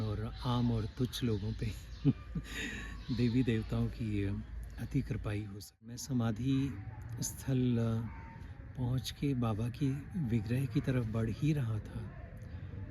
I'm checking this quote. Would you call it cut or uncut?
cut